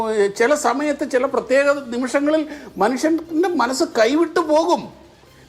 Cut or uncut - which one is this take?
uncut